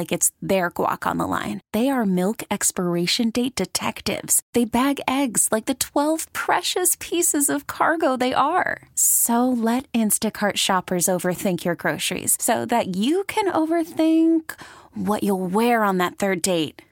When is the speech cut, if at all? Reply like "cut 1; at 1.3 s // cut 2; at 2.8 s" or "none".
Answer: none